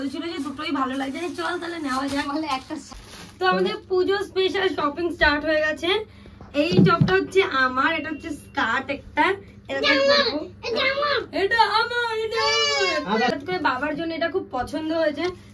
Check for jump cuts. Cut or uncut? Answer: cut